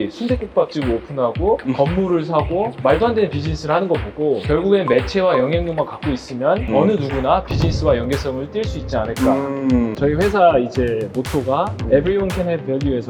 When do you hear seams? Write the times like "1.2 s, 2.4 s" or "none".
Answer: 1.6 s, 2.7 s, 4.4 s, 6.7 s, 9.9 s